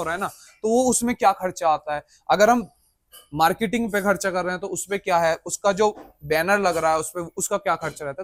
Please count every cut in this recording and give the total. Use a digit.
0